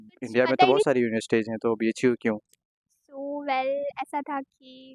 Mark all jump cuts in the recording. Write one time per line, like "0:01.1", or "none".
none